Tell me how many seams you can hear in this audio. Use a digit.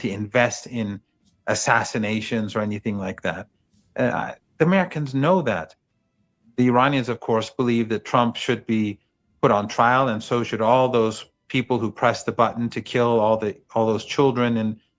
0